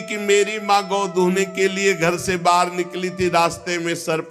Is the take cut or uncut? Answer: uncut